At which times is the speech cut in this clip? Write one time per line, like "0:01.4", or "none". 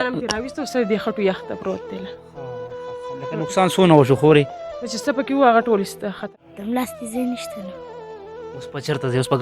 0:06.2